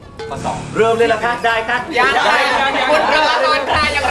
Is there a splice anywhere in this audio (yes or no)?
no